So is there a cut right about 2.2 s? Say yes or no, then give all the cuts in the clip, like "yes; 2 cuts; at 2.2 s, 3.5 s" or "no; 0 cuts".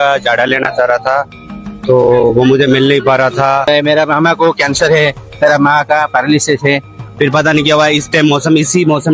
no; 2 cuts; at 3.6 s, 7.0 s